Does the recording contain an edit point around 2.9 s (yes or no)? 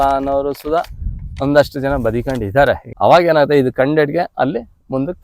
yes